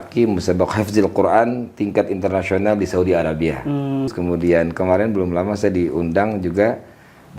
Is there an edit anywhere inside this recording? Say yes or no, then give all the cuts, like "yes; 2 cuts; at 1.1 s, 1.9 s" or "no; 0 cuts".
yes; 1 cut; at 4.1 s